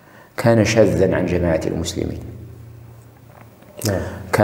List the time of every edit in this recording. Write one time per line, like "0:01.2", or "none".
none